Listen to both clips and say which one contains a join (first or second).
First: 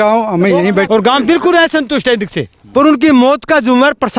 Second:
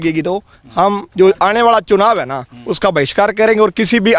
first